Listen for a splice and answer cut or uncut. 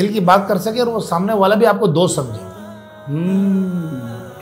uncut